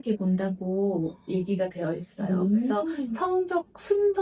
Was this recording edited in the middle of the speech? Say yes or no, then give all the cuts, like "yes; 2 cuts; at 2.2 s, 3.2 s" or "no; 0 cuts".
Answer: no; 0 cuts